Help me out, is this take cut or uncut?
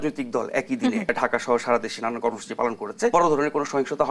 cut